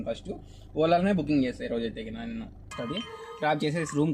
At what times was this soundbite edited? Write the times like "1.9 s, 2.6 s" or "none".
2.6 s